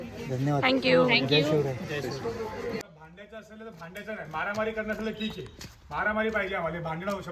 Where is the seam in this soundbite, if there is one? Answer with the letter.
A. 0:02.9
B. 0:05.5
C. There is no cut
A